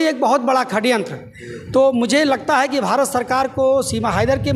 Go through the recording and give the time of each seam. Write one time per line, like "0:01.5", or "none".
none